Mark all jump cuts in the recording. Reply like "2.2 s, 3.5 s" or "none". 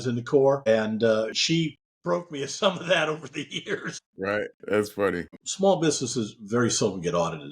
1.4 s, 5.3 s